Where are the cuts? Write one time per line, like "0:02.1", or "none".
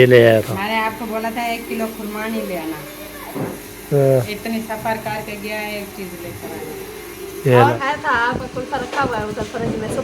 0:03.4
0:07.8